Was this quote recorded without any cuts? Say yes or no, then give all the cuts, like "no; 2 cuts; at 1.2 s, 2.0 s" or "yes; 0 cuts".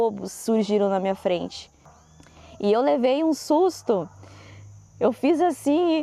no; 1 cut; at 2.2 s